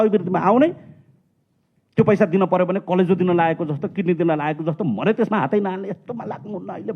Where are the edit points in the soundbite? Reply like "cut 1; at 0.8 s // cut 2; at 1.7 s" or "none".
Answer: none